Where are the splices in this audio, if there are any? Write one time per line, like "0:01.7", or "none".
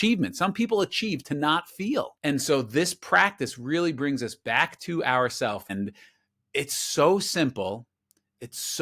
0:02.1
0:05.7